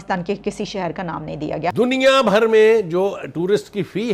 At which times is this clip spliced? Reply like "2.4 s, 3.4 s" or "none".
1.7 s